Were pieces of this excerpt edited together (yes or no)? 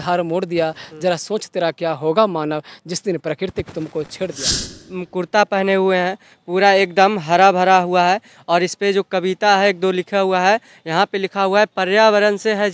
yes